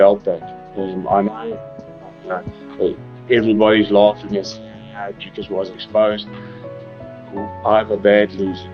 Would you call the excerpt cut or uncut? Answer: uncut